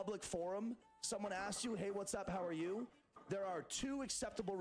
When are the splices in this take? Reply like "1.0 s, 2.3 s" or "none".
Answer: none